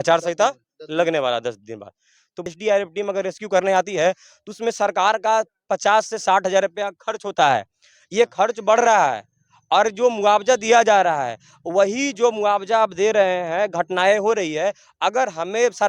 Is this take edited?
yes; 1 cut; at 2.4 s

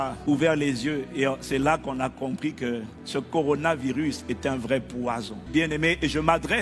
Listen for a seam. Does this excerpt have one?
no; 0 cuts

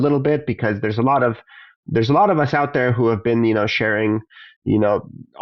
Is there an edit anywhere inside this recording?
no; 0 cuts

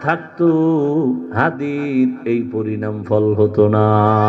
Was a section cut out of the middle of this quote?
yes; 1 cut; at 1.3 s

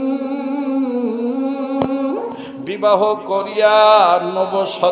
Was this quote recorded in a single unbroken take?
yes; 0 cuts

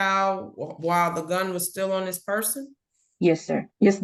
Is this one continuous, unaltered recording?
yes; 0 cuts

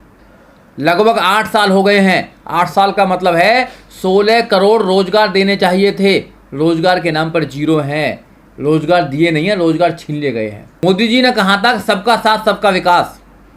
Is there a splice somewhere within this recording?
yes; 1 cut; at 10.6 s

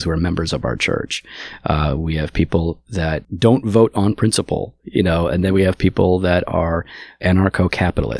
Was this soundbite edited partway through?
yes; 2 cuts; at 3.3 s, 7.0 s

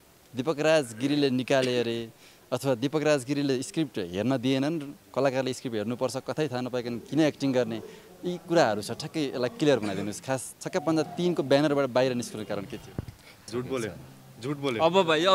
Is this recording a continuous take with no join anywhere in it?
no; 1 cut; at 13.4 s

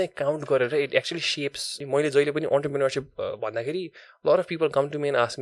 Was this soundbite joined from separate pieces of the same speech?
yes; 1 cut; at 1.7 s

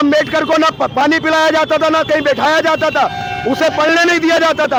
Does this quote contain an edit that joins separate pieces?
no; 0 cuts

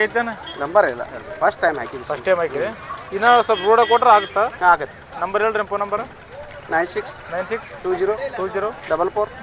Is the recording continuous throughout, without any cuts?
yes; 0 cuts

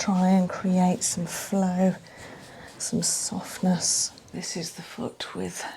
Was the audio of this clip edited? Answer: yes; 1 cut; at 4.3 s

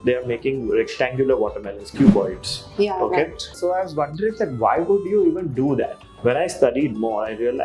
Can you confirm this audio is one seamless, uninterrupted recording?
no; 2 cuts; at 3.5 s, 6.0 s

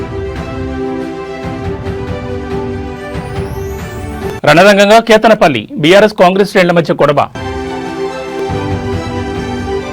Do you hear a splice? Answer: no; 0 cuts

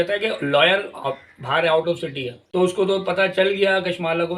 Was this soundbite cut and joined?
yes; 1 cut; at 2.3 s

